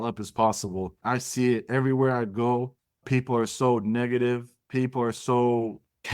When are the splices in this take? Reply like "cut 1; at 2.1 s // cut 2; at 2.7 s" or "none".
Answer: cut 1; at 0.9 s // cut 2; at 3.0 s // cut 3; at 4.6 s